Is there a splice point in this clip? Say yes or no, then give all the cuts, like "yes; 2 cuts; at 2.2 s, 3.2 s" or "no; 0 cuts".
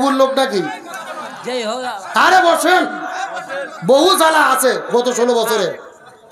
no; 0 cuts